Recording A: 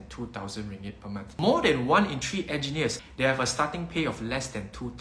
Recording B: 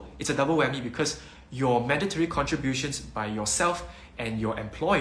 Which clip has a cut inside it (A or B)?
A